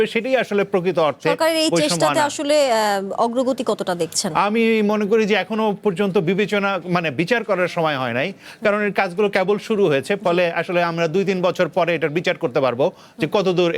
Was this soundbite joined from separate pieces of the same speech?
no; 0 cuts

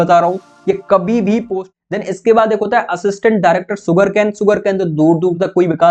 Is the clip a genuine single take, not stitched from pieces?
no; 1 cut; at 1.6 s

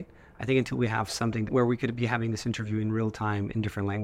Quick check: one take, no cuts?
no; 1 cut; at 1.5 s

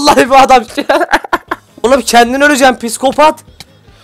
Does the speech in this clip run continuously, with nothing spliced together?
no; 1 cut; at 1.8 s

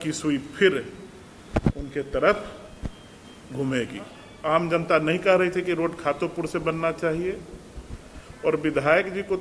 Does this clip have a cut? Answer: yes; 1 cut; at 4.2 s

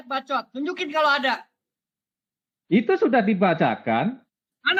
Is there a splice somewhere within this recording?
no; 0 cuts

